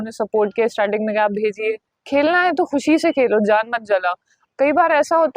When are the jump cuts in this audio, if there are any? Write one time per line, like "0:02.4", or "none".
0:01.9
0:04.4